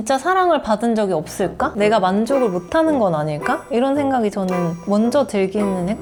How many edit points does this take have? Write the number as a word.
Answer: zero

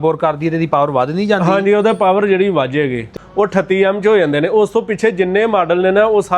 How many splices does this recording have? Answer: one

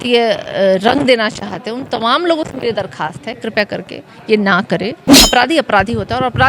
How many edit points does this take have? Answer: one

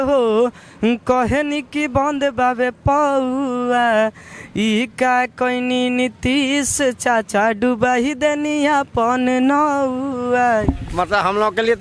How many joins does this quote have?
one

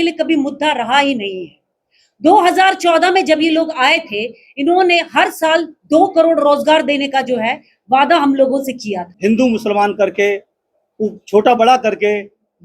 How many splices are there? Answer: one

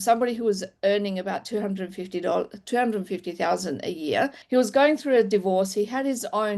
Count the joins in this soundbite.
one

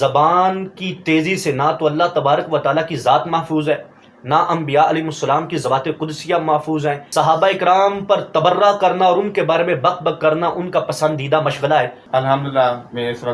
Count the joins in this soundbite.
two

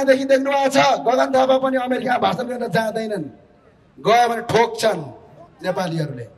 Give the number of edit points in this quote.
zero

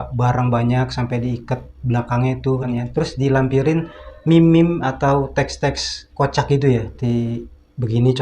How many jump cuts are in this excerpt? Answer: two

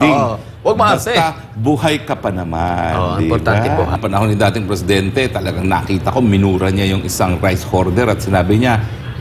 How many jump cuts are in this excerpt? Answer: one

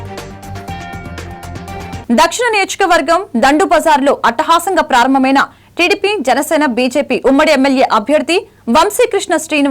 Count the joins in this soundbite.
zero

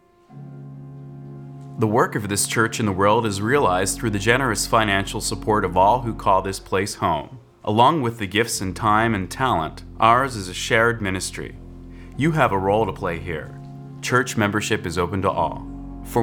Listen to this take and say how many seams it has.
one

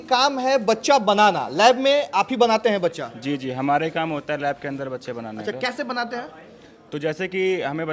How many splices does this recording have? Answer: zero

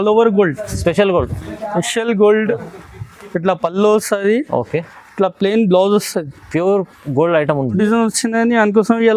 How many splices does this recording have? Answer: one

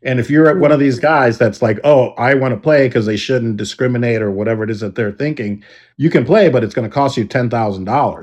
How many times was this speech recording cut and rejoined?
zero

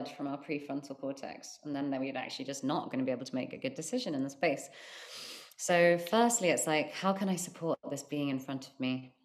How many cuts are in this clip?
zero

